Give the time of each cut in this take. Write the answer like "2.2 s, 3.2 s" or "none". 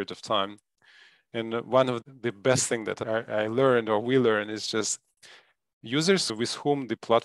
2.0 s, 3.0 s, 6.3 s